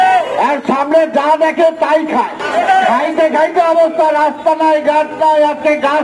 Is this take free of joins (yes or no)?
no